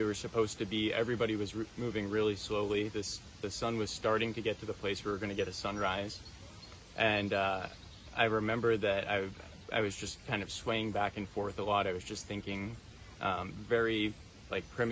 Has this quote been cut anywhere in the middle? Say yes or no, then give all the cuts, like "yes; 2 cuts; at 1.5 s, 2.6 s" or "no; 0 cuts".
no; 0 cuts